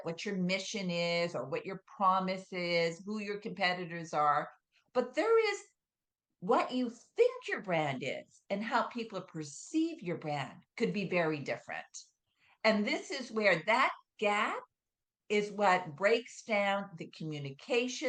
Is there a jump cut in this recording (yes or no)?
no